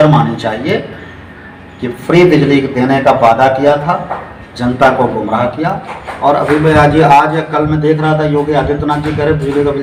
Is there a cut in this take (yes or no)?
no